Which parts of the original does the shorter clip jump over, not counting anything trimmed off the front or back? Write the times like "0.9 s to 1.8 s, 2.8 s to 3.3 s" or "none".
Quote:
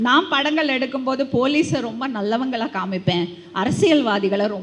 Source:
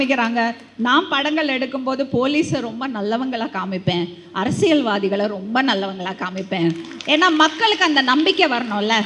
none

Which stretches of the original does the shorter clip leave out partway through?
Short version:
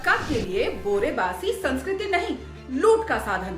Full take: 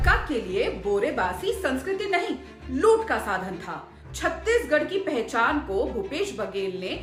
none

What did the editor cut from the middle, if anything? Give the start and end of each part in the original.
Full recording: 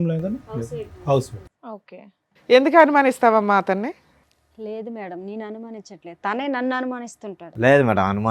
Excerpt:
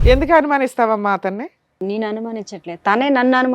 4.3 s to 5.2 s

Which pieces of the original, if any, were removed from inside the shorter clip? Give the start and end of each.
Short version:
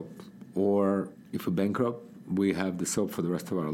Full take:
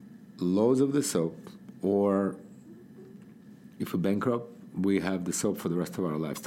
2.5 s to 3.6 s

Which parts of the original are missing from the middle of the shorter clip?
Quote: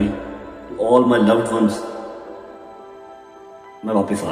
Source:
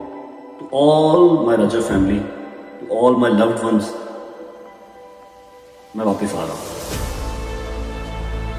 none

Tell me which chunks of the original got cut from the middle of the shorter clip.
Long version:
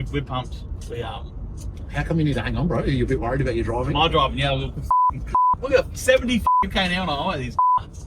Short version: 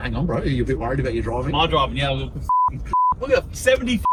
none

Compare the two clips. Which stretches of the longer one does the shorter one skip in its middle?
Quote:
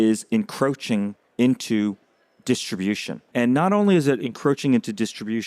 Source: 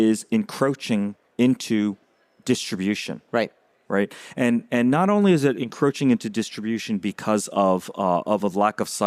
3.3 s to 4.6 s

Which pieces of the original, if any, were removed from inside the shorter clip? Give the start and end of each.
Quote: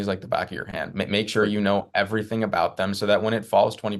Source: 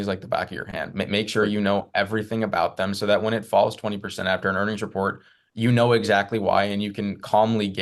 none

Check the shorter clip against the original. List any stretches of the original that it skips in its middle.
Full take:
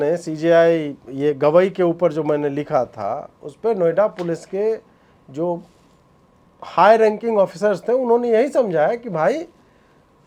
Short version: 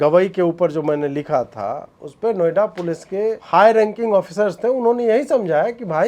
4.8 s to 6.7 s

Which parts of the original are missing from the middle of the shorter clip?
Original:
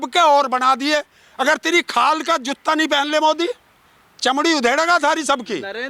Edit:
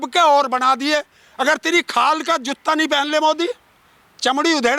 none

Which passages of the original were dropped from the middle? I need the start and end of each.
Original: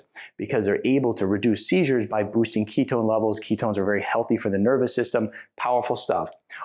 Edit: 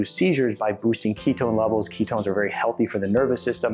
none

